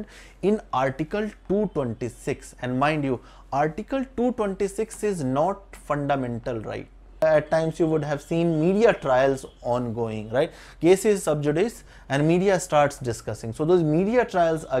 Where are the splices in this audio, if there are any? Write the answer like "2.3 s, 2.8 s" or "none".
7.2 s